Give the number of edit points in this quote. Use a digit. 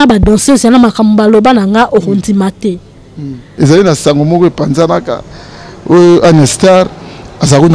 1